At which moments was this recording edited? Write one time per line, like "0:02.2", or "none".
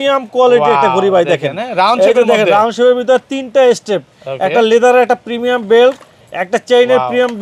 none